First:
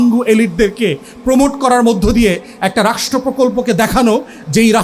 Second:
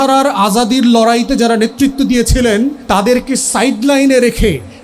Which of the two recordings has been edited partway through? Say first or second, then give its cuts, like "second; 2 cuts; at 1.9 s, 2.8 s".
second; 1 cut; at 2.8 s